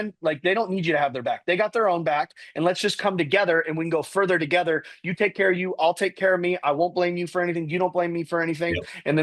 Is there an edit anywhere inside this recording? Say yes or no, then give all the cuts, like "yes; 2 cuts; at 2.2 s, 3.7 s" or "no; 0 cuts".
no; 0 cuts